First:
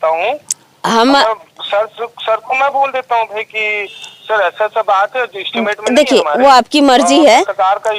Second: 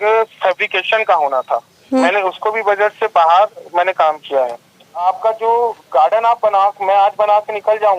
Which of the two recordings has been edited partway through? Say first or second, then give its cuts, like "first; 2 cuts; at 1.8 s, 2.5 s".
second; 2 cuts; at 2.0 s, 5.0 s